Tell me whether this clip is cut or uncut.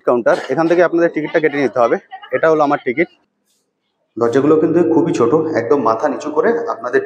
cut